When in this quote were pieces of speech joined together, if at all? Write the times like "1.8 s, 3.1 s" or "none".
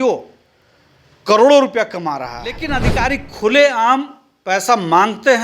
2.7 s